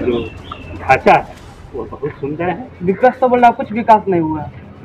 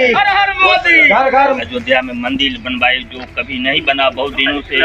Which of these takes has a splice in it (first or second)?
second